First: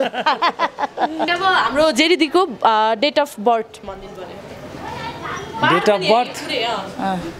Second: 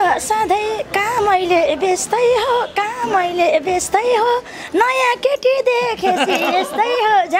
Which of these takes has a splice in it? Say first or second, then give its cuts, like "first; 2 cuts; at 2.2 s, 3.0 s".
first; 1 cut; at 1.3 s